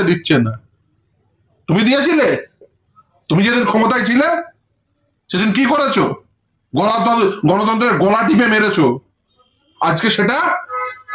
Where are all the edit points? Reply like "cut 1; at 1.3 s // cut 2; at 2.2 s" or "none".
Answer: none